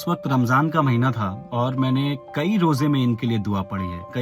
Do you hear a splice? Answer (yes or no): yes